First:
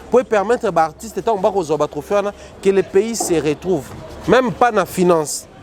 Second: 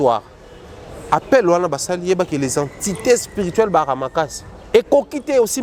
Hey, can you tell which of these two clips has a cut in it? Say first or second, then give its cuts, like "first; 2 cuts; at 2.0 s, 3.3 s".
second; 1 cut; at 4.7 s